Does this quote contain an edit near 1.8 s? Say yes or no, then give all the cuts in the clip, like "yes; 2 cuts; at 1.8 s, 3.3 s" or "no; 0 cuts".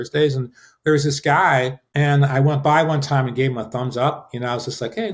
yes; 1 cut; at 1.8 s